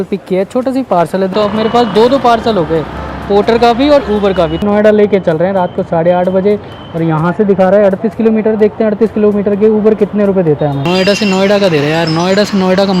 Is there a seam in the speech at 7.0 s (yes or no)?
no